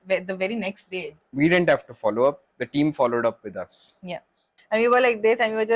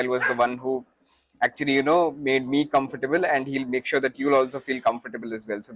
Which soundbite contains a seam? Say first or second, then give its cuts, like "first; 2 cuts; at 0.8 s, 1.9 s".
first; 2 cuts; at 1.2 s, 4.5 s